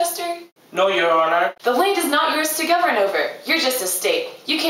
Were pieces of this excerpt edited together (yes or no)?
yes